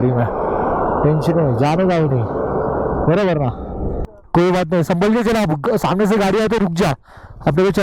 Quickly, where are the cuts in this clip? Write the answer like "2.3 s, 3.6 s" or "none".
4.1 s